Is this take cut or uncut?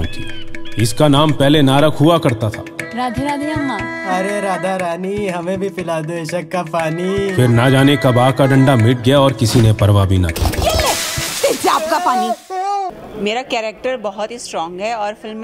cut